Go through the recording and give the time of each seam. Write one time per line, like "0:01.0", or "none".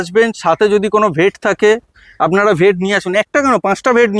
none